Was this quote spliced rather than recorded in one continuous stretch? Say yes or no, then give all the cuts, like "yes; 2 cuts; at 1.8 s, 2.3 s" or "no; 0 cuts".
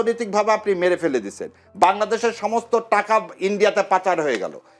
no; 0 cuts